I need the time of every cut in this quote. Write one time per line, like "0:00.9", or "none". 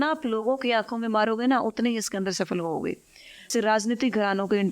0:03.5